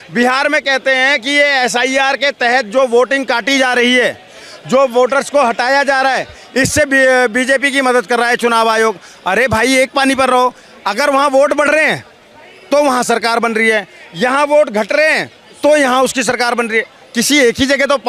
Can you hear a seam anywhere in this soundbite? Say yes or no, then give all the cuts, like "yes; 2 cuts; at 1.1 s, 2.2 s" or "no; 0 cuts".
no; 0 cuts